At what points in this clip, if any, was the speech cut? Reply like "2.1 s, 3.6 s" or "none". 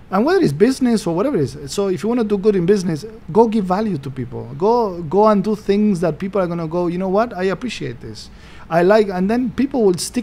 none